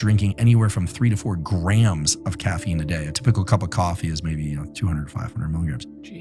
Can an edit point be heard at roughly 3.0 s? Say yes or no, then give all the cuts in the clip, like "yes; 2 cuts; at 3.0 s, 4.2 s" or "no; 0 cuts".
no; 0 cuts